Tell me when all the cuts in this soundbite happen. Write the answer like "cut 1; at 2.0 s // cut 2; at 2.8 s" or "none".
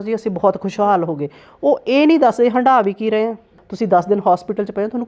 cut 1; at 3.6 s